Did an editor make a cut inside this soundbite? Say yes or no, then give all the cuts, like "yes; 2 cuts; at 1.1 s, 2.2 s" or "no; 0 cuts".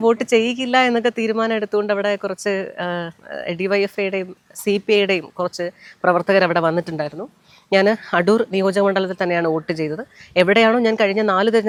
no; 0 cuts